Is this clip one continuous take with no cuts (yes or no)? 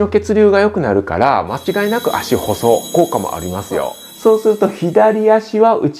no